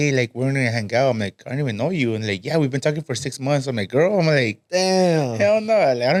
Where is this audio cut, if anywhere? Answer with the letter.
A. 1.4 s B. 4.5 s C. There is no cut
C